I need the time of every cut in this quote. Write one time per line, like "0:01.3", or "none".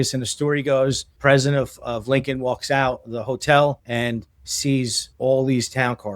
0:01.1
0:03.8
0:05.0